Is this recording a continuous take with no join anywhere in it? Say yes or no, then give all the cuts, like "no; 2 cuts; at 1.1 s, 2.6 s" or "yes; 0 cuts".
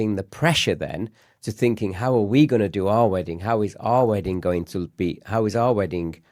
yes; 0 cuts